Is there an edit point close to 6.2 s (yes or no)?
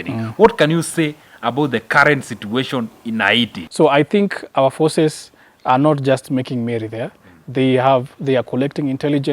no